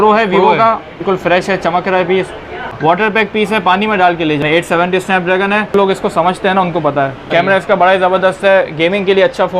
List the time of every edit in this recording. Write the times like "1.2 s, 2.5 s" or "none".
1.0 s, 2.7 s, 4.4 s, 5.7 s, 7.2 s